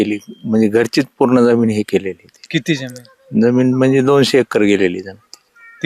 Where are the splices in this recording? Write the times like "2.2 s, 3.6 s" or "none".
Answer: none

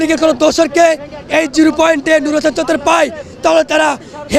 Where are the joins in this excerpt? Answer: none

